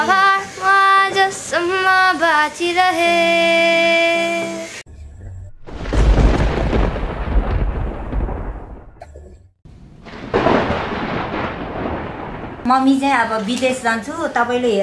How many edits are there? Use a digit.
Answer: 1